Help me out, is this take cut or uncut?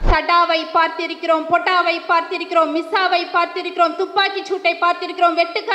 uncut